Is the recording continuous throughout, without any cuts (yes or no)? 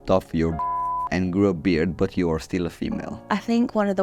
no